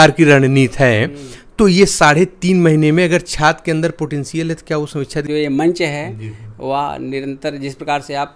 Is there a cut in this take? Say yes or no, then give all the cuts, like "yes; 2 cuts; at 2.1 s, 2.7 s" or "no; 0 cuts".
yes; 1 cut; at 5.3 s